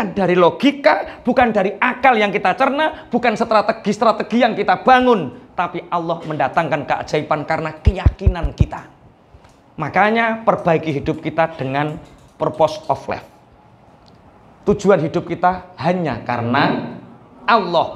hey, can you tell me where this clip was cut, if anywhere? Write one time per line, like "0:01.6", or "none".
none